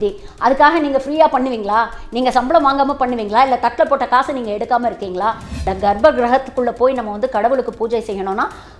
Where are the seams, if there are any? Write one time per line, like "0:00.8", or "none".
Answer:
0:05.7